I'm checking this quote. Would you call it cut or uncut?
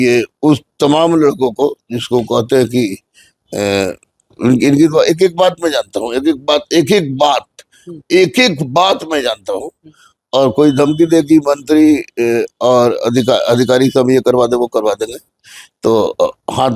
uncut